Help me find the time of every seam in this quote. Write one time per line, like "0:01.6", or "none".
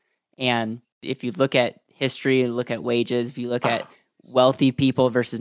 0:01.0